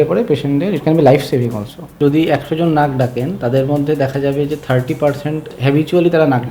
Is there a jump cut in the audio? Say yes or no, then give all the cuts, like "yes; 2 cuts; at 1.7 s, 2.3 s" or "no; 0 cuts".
yes; 2 cuts; at 1.8 s, 5.5 s